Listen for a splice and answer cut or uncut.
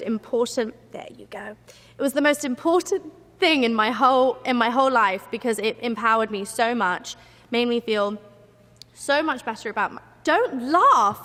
uncut